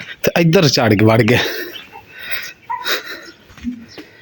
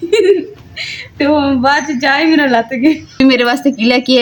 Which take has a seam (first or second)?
second